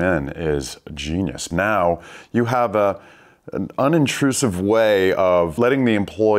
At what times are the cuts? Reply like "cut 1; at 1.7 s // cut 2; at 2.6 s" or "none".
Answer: cut 1; at 1.5 s // cut 2; at 5.5 s